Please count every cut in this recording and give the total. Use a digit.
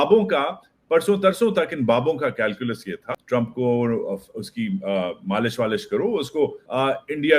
1